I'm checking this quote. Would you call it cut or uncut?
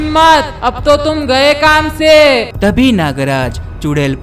cut